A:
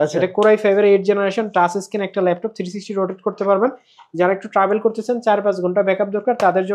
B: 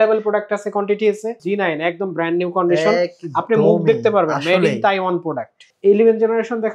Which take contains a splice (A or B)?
B